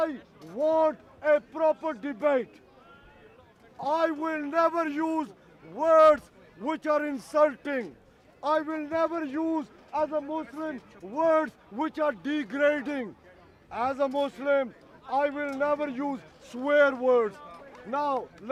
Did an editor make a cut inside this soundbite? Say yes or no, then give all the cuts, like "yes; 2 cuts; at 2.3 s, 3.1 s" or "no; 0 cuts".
no; 0 cuts